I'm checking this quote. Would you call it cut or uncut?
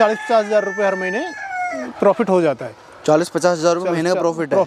uncut